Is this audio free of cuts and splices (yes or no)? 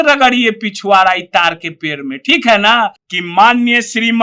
no